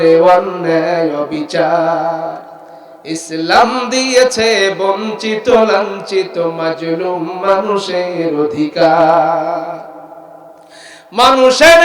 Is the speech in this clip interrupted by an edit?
no; 0 cuts

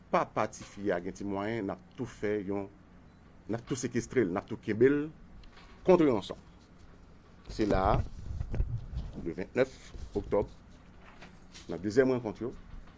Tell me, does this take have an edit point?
yes; 1 cut; at 1.4 s

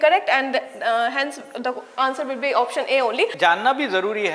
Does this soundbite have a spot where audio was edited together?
yes; 1 cut; at 3.3 s

